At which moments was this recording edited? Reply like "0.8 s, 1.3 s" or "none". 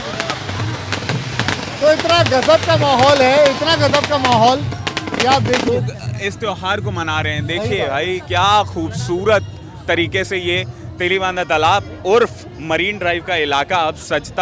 5.7 s